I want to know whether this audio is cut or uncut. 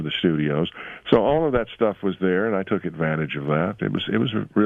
uncut